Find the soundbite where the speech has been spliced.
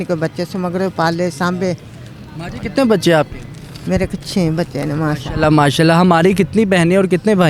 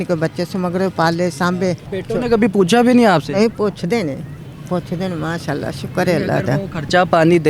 second; 1 cut; at 1.9 s

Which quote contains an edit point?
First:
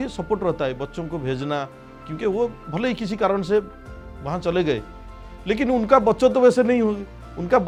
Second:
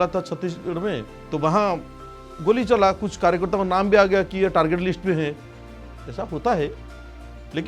second; 1 cut; at 1.1 s

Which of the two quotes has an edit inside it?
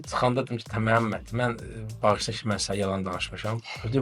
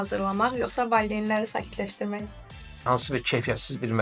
second; 1 cut; at 2.9 s

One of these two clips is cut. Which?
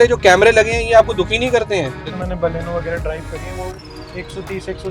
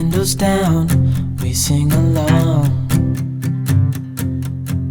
first; 1 cut; at 2.0 s

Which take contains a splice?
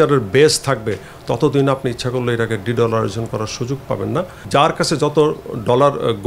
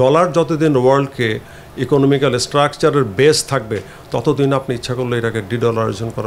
first; 1 cut; at 4.3 s

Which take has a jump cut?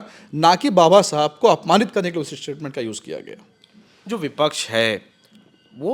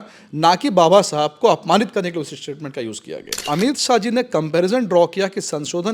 second; 1 cut; at 3.4 s

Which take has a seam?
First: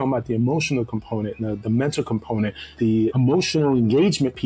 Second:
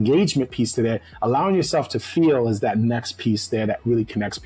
first; 1 cut; at 2.9 s

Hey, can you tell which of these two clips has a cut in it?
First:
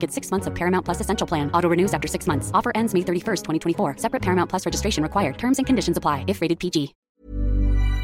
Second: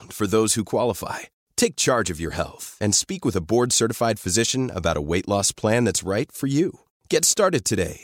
first; 1 cut; at 7.0 s

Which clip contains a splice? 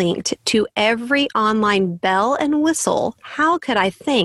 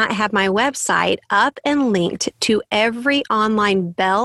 first; 1 cut; at 3.2 s

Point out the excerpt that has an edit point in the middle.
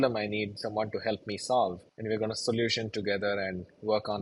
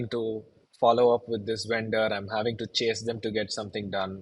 first; 1 cut; at 1.9 s

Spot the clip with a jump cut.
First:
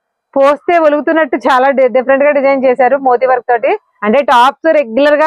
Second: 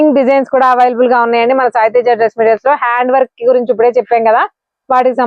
first; 1 cut; at 3.9 s

